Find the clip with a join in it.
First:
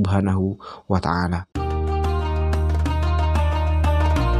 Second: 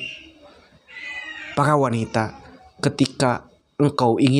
first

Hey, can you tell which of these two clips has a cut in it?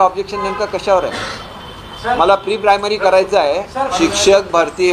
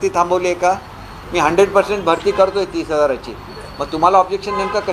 first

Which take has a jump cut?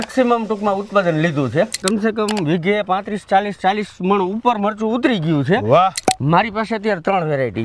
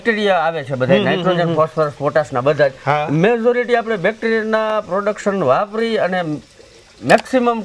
first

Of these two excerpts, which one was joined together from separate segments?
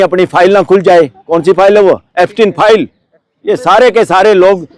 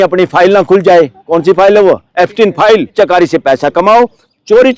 second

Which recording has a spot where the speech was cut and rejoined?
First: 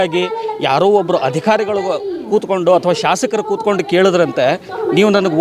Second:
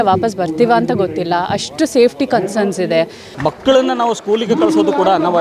second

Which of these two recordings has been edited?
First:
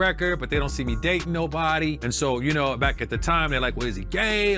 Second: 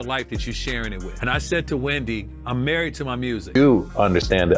second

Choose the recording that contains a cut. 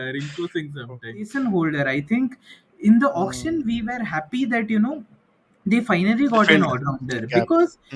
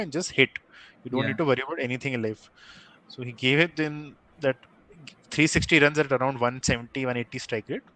first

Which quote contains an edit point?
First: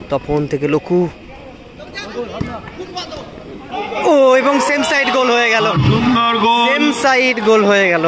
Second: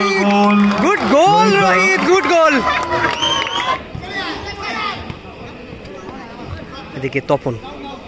second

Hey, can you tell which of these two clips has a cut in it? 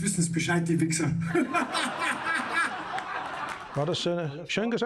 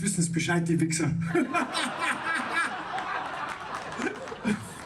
first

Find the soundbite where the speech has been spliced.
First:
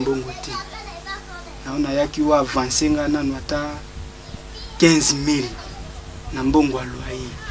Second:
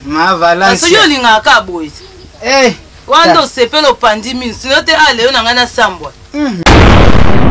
second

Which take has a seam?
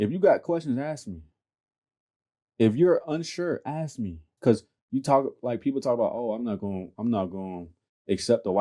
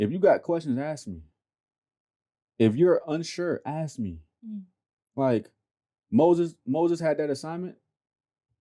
first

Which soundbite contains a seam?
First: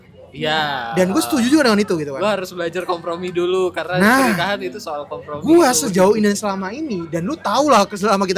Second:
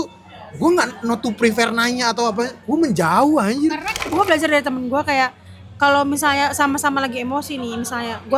second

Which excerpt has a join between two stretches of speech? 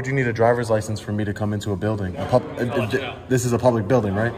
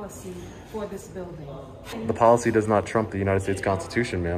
second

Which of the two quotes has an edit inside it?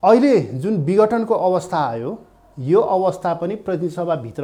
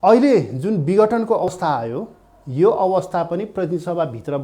second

